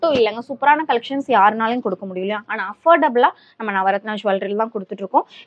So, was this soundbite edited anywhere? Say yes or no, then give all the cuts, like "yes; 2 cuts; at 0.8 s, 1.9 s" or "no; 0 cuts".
no; 0 cuts